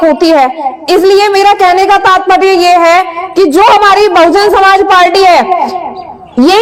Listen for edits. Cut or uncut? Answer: uncut